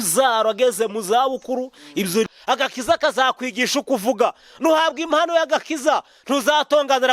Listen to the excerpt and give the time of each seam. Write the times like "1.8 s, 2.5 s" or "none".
2.3 s